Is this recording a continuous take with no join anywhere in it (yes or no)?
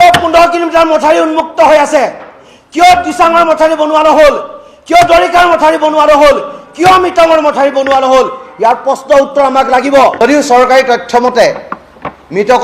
no